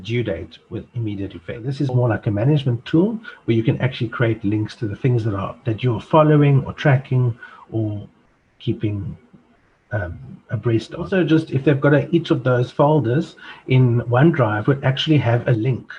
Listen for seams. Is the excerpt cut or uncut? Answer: cut